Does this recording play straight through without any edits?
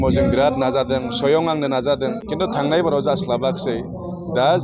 no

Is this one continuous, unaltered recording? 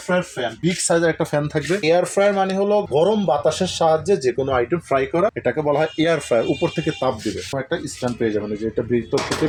yes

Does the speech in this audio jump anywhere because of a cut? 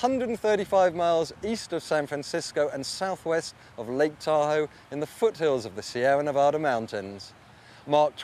no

